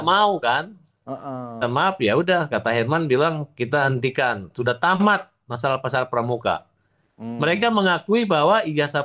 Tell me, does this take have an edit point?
yes; 1 cut; at 1.6 s

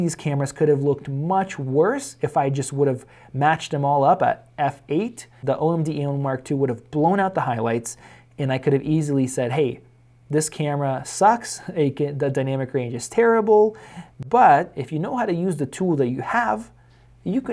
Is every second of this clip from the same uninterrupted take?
no; 2 cuts; at 5.4 s, 14.2 s

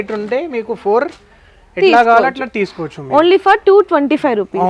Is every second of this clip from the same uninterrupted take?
yes; 0 cuts

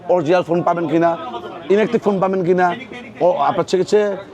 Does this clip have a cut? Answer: no; 0 cuts

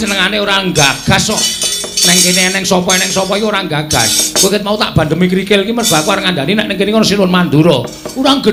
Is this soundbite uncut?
yes; 0 cuts

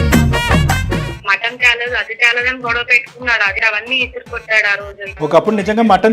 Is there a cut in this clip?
yes; 3 cuts; at 1.2 s, 3.6 s, 5.1 s

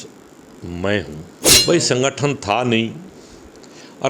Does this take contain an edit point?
yes; 1 cut; at 1.5 s

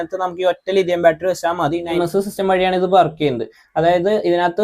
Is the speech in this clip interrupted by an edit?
yes; 1 cut; at 2.0 s

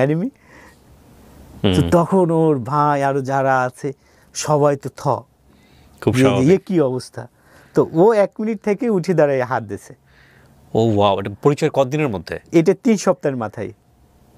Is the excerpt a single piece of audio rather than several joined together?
yes; 0 cuts

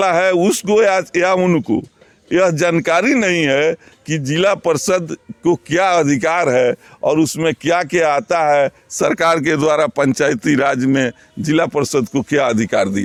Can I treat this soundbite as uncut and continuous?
yes; 0 cuts

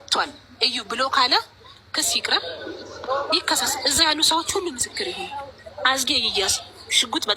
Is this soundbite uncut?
yes; 0 cuts

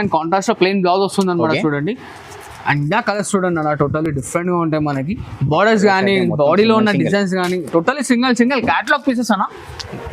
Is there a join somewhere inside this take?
no; 0 cuts

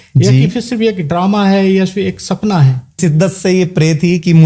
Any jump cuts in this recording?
yes; 1 cut; at 3.0 s

